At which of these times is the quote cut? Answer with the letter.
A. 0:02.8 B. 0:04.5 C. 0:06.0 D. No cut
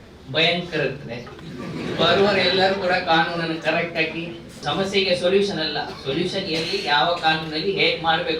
B